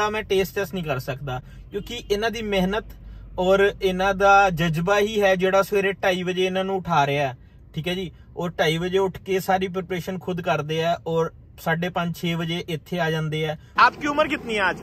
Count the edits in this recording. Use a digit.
1